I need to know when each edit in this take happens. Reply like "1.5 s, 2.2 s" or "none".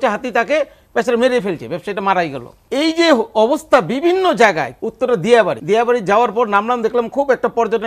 2.5 s, 4.7 s, 5.6 s